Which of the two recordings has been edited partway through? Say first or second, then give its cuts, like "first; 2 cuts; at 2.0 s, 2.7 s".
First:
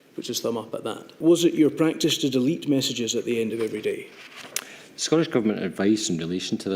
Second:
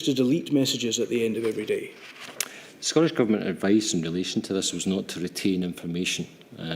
first; 1 cut; at 1.1 s